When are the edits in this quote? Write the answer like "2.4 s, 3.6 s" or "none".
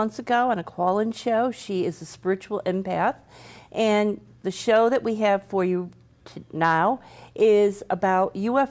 6.4 s